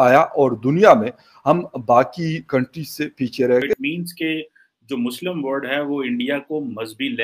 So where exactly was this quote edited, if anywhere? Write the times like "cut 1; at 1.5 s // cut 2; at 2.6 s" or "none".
cut 1; at 3.7 s